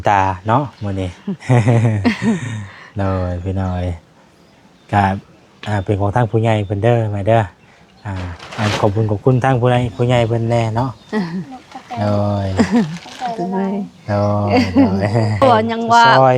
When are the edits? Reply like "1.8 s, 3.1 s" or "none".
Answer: 15.4 s